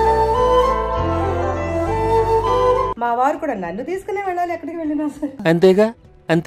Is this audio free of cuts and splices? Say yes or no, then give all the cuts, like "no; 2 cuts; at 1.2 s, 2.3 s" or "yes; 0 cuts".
no; 2 cuts; at 2.9 s, 5.4 s